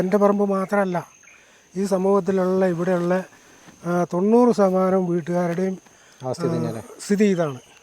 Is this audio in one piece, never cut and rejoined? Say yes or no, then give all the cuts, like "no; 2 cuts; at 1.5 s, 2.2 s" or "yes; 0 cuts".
yes; 0 cuts